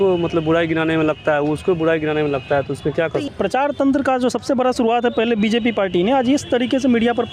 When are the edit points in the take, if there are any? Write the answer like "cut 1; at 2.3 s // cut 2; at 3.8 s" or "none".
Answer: cut 1; at 3.3 s